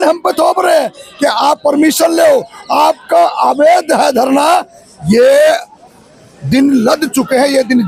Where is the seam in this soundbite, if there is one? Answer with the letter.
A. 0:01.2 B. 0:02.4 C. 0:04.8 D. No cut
D